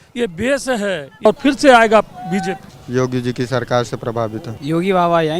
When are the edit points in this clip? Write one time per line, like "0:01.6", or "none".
0:01.2
0:02.7
0:04.5